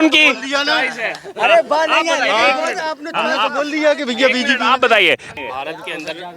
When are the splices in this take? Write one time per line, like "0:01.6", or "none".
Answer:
0:05.3

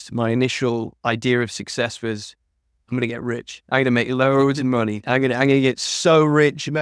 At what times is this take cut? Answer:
0:00.9

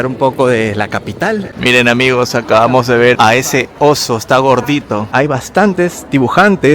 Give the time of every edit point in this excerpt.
0:01.5
0:05.1

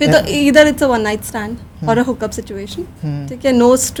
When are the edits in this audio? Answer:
none

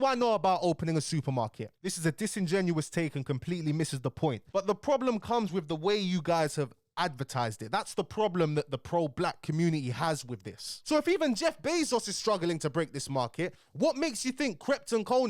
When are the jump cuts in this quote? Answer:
0:01.7
0:04.5
0:10.7

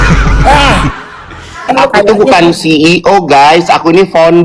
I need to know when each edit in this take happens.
0:01.7

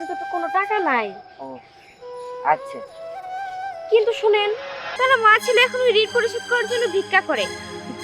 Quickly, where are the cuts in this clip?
0:04.8

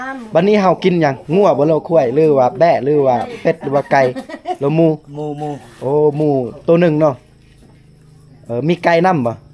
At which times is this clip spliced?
none

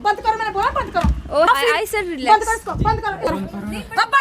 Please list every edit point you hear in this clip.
0:01.5
0:03.2

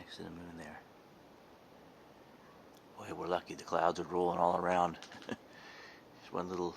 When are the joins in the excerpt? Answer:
0:02.7

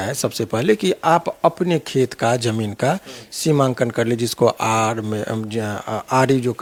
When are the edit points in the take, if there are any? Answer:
none

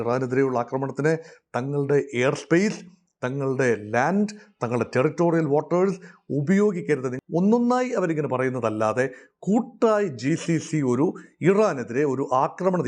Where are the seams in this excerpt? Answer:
0:07.1

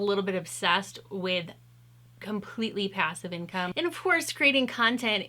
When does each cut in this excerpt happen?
0:03.7

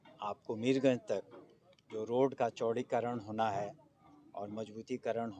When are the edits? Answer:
none

